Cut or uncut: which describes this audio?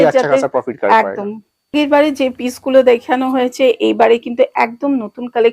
cut